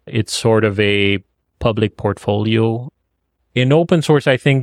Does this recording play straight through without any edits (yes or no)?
no